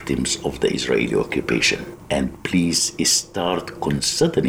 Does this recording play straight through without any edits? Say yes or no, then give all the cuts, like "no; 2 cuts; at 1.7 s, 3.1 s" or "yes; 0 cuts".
no; 1 cut; at 1.9 s